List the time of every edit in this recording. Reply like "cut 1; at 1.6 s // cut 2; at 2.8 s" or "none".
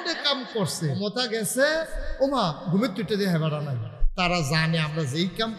cut 1; at 0.9 s // cut 2; at 4.0 s